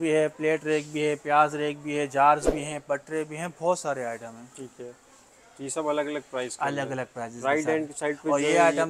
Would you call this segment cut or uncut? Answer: uncut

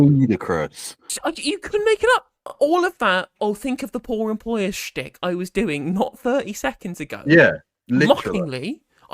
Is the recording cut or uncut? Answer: cut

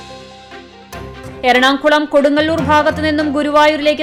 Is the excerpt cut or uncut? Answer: uncut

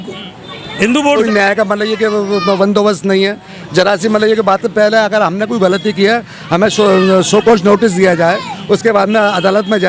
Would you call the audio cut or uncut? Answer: cut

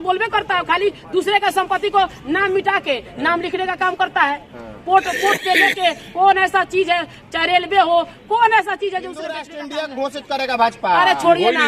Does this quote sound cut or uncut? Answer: cut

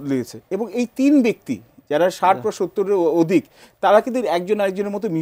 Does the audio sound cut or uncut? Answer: uncut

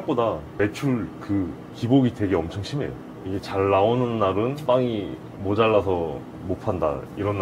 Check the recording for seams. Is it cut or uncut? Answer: uncut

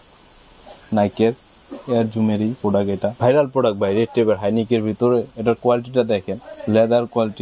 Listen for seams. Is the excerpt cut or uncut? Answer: cut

